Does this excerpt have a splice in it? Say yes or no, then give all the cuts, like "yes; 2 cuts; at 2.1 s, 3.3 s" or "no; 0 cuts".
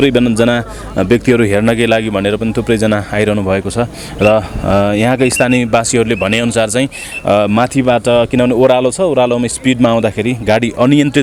no; 0 cuts